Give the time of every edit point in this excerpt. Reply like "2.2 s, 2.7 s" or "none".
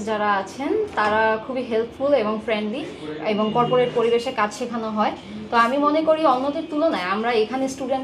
none